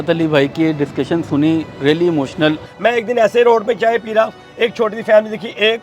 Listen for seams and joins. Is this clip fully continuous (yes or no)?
no